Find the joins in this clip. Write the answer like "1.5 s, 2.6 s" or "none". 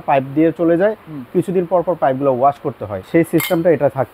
2.9 s